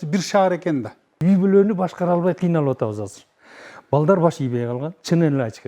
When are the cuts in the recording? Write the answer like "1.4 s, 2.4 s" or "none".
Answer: 1.2 s